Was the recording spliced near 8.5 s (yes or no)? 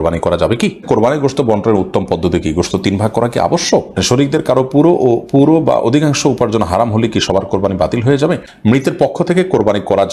yes